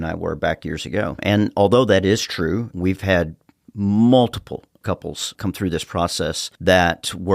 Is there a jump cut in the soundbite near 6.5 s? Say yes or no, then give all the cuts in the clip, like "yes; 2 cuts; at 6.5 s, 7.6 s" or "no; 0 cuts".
yes; 2 cuts; at 4.7 s, 6.5 s